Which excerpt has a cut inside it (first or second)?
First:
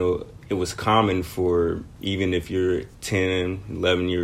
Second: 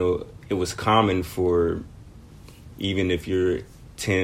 first